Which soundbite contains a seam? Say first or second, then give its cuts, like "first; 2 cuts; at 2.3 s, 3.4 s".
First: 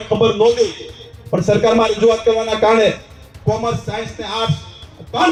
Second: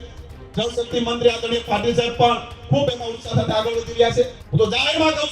second; 1 cut; at 4.4 s